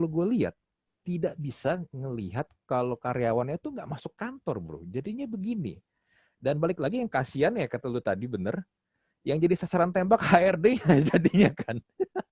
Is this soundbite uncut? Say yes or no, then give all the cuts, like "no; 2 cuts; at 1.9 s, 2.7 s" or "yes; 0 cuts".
yes; 0 cuts